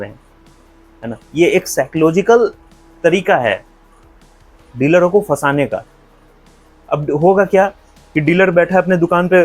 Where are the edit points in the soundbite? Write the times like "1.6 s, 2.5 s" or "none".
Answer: none